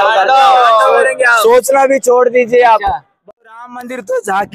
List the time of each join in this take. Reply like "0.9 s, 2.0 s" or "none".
3.3 s